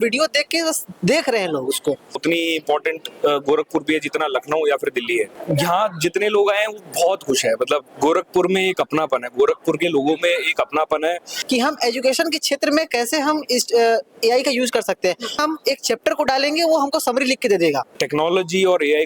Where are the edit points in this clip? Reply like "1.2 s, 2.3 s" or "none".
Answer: 2.2 s, 5.4 s, 11.3 s, 15.4 s, 17.9 s